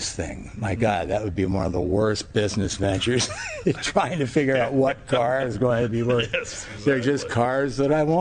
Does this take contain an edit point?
no; 0 cuts

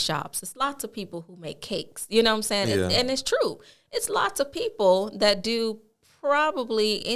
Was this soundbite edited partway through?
no; 0 cuts

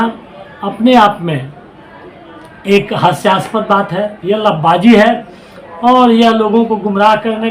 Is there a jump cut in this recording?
yes; 1 cut; at 4.2 s

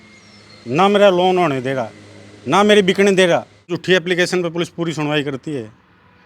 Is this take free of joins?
no; 1 cut; at 3.8 s

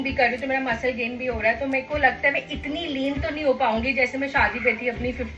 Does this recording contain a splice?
no; 0 cuts

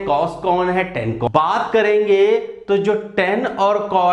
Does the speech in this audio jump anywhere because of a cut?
yes; 1 cut; at 1.2 s

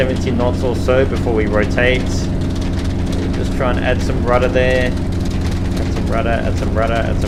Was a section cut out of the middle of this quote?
no; 0 cuts

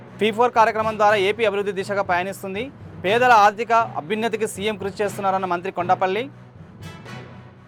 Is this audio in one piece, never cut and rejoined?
yes; 0 cuts

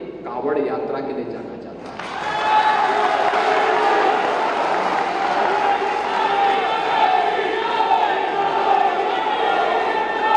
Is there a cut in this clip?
no; 0 cuts

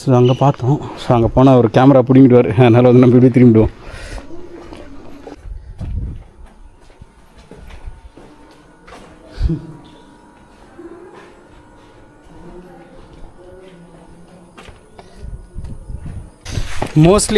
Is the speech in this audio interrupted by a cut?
no; 0 cuts

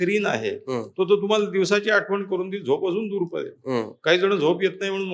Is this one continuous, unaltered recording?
yes; 0 cuts

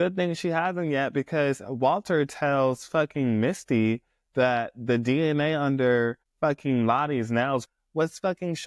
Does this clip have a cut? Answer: yes; 1 cut; at 7.7 s

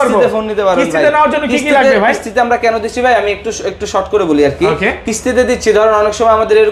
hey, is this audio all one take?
yes; 0 cuts

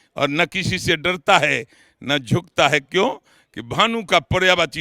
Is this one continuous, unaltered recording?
yes; 0 cuts

